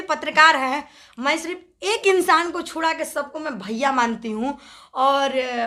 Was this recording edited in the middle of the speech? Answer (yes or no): no